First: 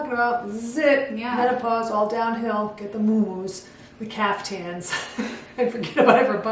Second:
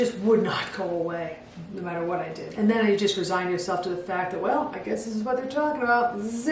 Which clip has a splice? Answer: second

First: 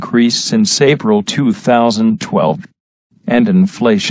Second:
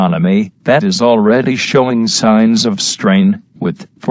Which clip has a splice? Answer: first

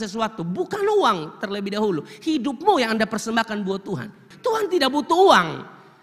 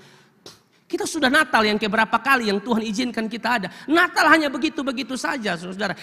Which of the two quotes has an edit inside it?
first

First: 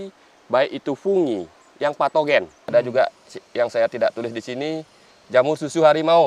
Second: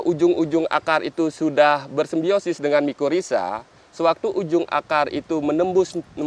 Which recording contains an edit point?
first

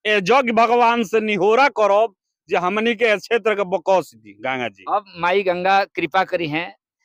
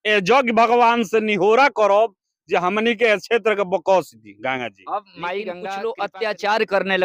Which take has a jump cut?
second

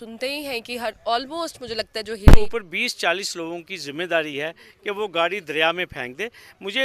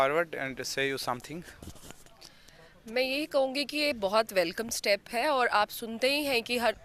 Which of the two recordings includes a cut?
first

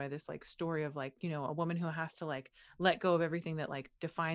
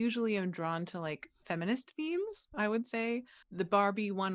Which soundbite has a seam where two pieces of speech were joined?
second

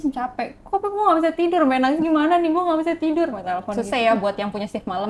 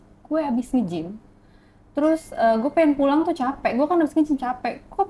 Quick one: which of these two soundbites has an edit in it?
first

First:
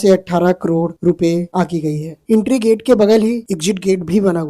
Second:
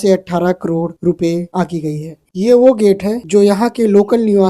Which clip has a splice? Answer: second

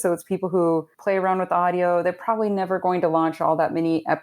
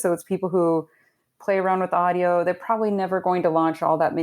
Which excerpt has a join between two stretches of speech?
first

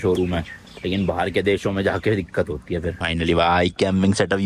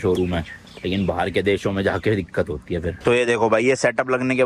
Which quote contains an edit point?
second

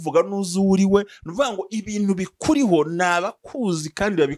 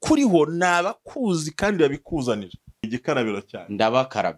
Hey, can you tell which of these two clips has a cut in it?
second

